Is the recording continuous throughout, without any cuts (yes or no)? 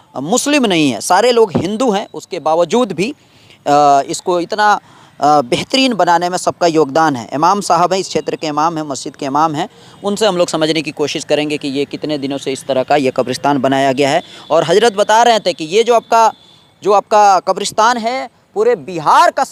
yes